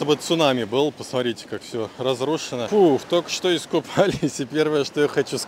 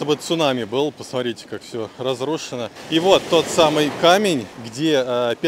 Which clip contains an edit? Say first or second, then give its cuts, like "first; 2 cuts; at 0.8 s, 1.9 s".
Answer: first; 1 cut; at 2.7 s